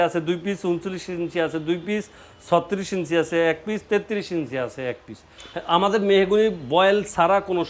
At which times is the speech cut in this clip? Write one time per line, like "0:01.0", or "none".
0:05.4

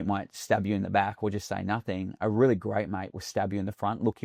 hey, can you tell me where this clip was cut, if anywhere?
none

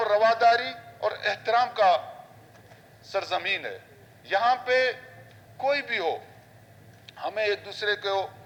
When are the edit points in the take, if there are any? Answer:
none

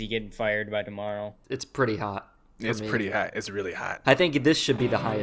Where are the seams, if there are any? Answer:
0:01.4
0:04.0

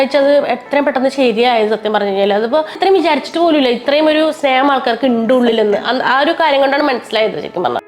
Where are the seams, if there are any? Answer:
0:02.8

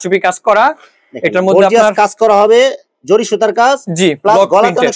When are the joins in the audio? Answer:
none

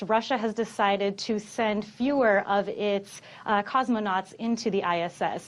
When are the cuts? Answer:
none

